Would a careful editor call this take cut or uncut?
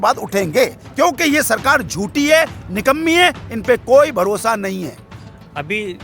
uncut